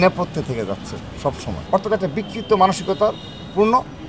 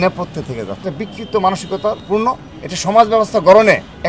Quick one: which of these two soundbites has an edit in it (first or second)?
second